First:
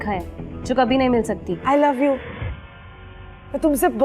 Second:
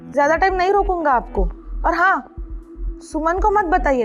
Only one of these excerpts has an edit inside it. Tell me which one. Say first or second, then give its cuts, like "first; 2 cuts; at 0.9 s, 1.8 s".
first; 1 cut; at 1.5 s